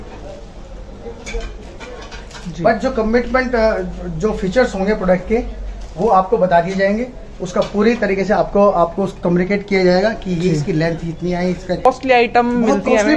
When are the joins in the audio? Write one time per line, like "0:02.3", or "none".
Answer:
0:11.9

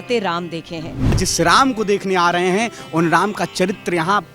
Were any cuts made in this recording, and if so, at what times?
0:01.2

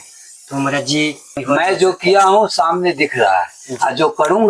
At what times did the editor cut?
0:01.4

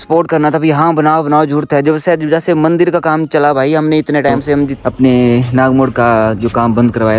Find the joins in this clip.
0:04.8

